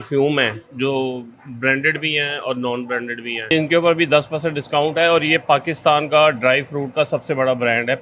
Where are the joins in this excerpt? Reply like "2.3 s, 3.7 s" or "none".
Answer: 3.5 s